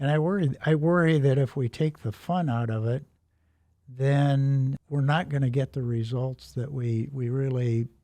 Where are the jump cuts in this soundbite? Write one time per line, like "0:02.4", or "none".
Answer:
0:04.8